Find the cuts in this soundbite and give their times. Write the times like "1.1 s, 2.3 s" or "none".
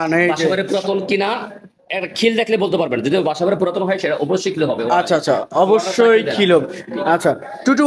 none